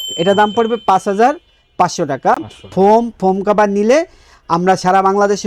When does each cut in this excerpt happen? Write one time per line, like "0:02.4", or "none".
none